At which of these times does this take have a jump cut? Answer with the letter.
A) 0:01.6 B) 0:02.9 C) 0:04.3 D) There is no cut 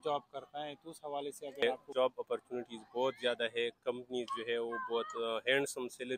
A